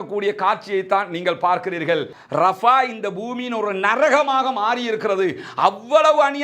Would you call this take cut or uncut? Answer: cut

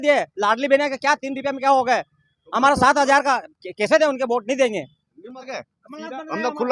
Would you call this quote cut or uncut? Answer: cut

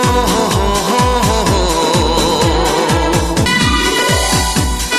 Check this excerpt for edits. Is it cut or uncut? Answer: cut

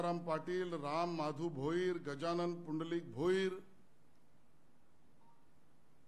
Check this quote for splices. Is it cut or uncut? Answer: uncut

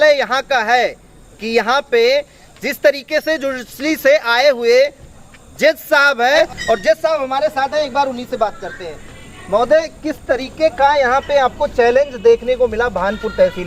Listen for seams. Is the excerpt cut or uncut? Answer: cut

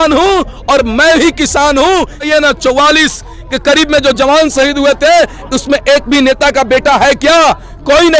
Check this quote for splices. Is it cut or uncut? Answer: cut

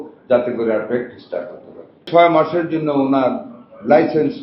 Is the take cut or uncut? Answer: cut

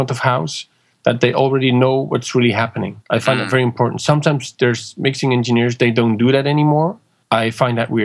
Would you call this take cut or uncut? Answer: cut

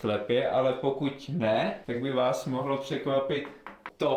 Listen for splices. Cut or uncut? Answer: uncut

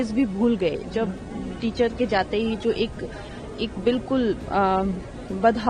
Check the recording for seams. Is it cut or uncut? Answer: uncut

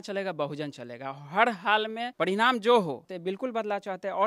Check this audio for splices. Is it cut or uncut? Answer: cut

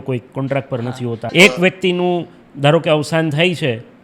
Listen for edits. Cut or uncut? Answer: cut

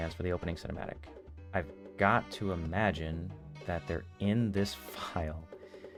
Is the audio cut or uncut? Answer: uncut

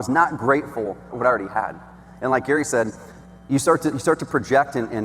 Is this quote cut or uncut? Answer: cut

